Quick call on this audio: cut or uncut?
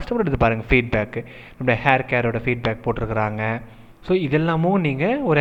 uncut